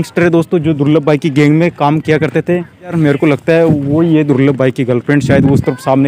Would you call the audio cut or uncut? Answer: cut